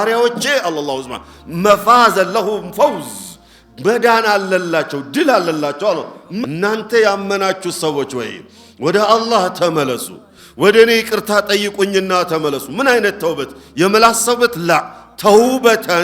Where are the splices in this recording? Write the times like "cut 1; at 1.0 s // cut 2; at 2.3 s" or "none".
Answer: cut 1; at 6.2 s